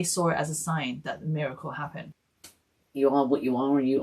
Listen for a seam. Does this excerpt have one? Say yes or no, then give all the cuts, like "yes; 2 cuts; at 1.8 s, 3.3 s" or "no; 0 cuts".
yes; 1 cut; at 2.1 s